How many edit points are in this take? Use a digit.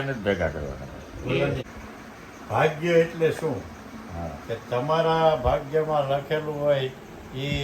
1